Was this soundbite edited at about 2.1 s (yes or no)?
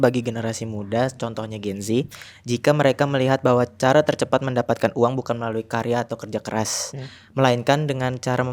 no